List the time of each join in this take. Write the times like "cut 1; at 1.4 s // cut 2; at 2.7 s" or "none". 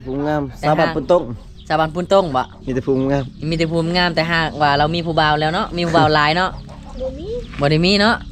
none